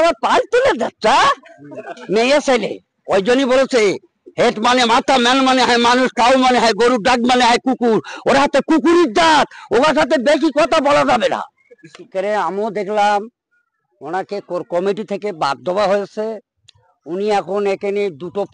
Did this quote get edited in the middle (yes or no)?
no